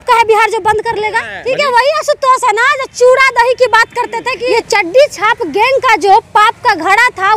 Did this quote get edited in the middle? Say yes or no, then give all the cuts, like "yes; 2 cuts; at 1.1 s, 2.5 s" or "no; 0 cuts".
yes; 2 cuts; at 1.3 s, 4.3 s